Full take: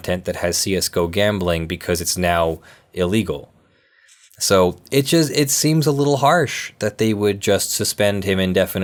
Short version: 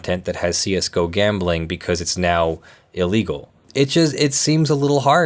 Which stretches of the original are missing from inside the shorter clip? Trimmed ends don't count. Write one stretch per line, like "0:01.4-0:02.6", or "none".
0:03.6-0:04.8